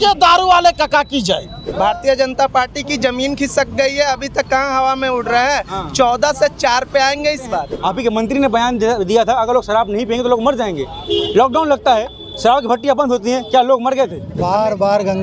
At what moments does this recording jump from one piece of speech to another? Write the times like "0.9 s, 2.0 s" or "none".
1.6 s, 7.8 s, 14.3 s